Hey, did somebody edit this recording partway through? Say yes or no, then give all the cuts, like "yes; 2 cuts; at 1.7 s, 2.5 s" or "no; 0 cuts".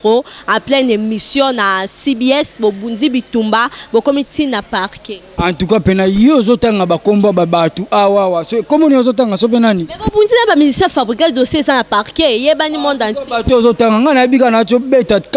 no; 0 cuts